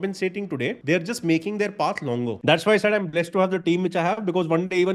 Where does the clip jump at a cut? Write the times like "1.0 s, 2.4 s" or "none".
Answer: 0.8 s, 2.4 s